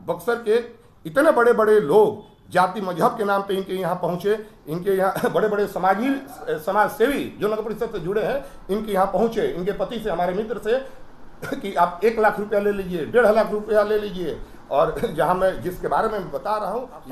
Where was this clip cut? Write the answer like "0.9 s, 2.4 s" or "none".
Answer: none